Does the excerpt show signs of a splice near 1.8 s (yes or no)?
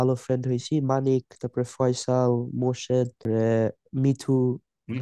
no